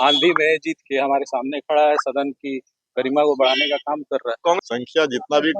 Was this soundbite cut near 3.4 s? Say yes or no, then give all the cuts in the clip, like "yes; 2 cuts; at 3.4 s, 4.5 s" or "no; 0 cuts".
no; 1 cut; at 4.6 s